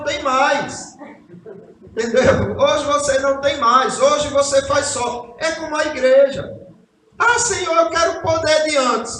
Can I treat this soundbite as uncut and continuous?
yes; 0 cuts

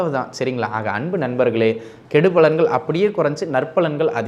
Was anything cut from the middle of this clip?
yes; 1 cut; at 1.9 s

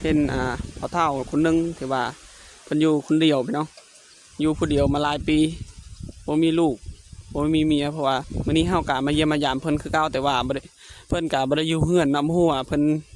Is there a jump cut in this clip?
yes; 1 cut; at 8.3 s

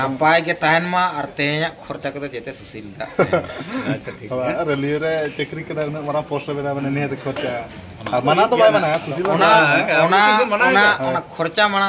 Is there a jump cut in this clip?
no; 0 cuts

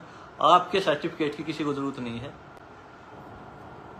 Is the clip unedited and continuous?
yes; 0 cuts

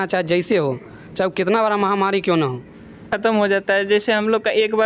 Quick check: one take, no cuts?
no; 1 cut; at 3.0 s

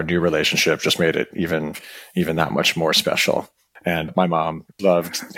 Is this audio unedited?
no; 1 cut; at 4.1 s

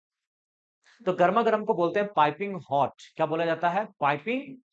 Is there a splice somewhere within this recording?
no; 0 cuts

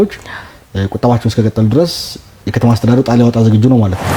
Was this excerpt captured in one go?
yes; 0 cuts

